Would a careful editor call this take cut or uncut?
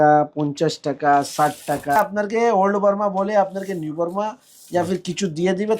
cut